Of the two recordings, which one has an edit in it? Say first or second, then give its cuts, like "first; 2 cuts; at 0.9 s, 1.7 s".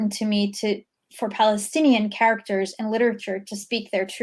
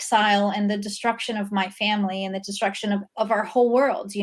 second; 1 cut; at 3.0 s